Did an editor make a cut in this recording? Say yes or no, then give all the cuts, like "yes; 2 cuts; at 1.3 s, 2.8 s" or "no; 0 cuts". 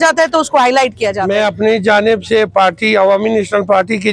yes; 1 cut; at 1.2 s